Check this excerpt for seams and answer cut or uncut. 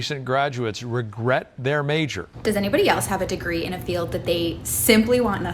cut